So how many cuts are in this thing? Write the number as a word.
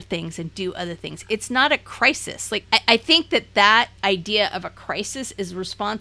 two